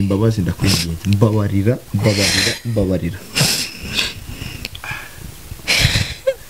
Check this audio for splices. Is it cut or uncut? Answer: uncut